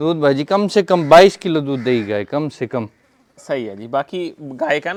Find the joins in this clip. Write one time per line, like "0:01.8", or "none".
none